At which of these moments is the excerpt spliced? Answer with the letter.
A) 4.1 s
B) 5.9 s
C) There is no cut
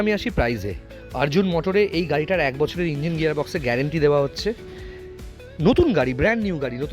C